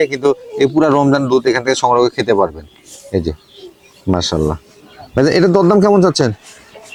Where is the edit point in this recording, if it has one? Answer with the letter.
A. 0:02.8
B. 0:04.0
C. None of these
C